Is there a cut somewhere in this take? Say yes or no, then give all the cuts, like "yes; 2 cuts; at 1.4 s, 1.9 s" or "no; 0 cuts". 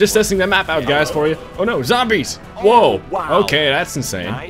yes; 1 cut; at 2.4 s